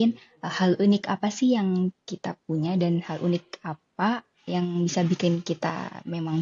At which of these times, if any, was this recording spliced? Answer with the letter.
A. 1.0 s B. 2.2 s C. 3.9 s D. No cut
D